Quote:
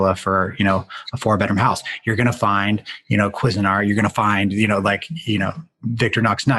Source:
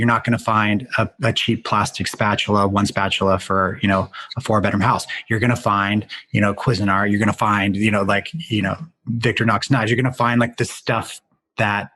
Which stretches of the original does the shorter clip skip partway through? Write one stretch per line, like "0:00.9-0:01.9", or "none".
none